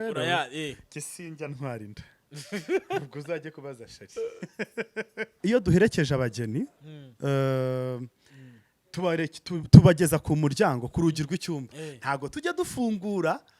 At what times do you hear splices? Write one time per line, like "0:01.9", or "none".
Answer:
0:05.4